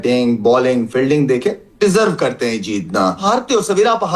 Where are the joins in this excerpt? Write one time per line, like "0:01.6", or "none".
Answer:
0:03.2